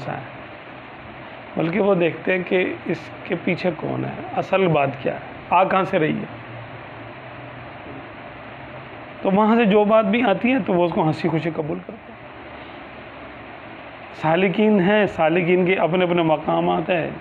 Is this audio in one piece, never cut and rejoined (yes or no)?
no